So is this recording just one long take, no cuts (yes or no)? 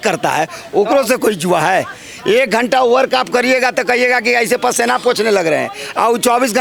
yes